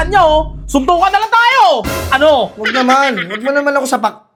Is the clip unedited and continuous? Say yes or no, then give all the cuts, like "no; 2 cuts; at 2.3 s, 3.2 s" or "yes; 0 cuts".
yes; 0 cuts